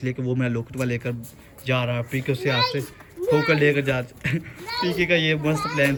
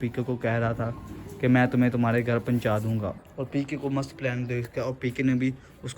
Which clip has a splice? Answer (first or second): second